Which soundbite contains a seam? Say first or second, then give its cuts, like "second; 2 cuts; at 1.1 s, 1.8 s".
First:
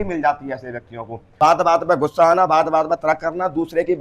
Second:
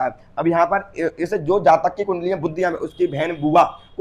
first; 1 cut; at 1.2 s